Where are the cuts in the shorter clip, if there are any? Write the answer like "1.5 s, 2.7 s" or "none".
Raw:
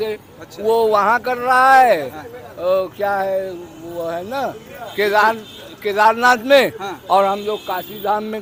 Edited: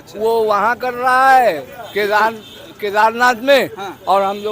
1.7 s